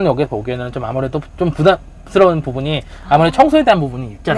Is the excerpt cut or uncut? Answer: uncut